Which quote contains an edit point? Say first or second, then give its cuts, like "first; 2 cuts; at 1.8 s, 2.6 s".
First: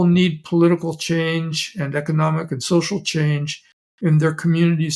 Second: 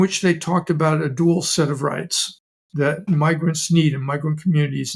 second; 1 cut; at 3.0 s